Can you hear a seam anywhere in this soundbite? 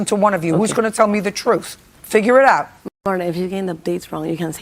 no; 0 cuts

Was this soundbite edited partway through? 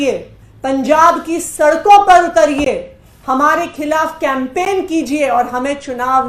no; 0 cuts

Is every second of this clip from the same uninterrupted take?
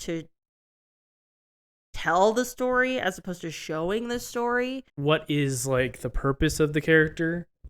no; 1 cut; at 4.9 s

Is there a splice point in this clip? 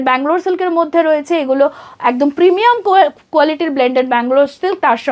no; 0 cuts

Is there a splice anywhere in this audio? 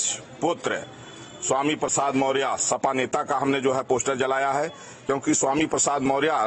yes; 1 cut; at 4.9 s

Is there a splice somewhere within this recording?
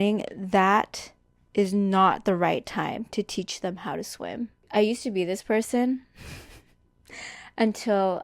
yes; 1 cut; at 4.6 s

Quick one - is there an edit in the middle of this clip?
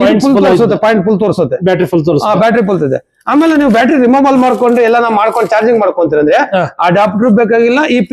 no; 0 cuts

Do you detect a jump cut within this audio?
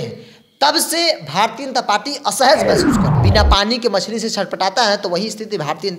yes; 1 cut; at 3.1 s

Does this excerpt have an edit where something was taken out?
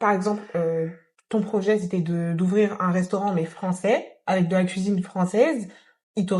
no; 0 cuts

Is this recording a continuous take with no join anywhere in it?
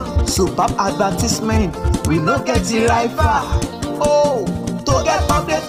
yes; 0 cuts

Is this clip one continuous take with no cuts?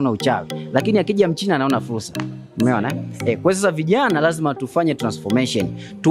yes; 0 cuts

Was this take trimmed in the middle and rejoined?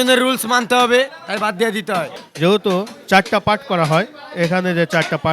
yes; 1 cut; at 2.2 s

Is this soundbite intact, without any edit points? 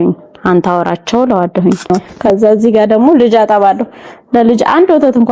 no; 1 cut; at 1.9 s

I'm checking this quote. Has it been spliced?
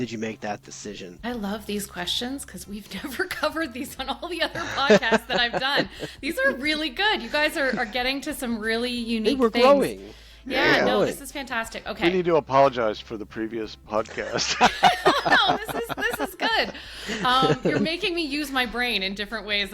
yes; 1 cut; at 1.1 s

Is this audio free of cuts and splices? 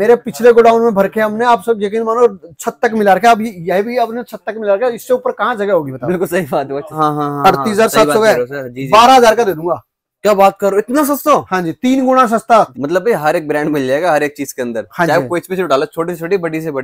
no; 2 cuts; at 7.0 s, 12.7 s

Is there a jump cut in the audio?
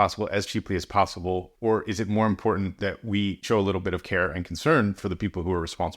yes; 2 cuts; at 1.5 s, 3.4 s

